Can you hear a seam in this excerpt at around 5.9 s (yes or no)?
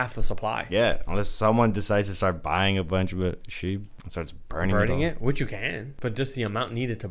yes